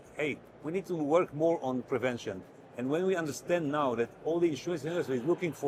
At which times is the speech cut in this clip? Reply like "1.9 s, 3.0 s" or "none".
none